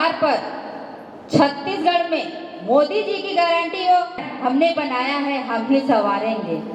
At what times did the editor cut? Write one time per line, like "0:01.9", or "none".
0:04.3

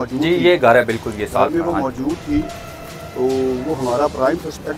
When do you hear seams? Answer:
none

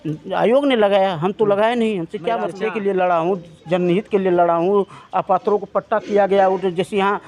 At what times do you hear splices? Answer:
0:02.6

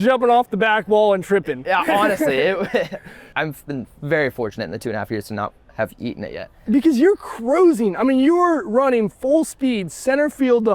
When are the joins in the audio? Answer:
0:03.3
0:06.5

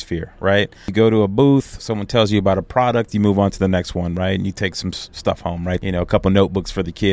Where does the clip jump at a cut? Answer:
0:00.9
0:05.8

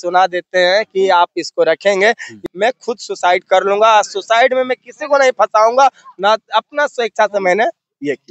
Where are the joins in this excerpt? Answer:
0:02.3

